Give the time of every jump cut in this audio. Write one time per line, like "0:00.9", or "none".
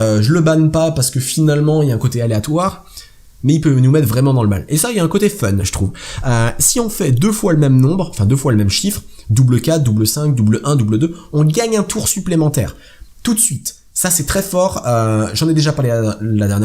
0:04.1